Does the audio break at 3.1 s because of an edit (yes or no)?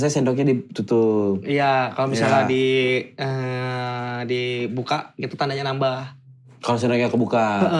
no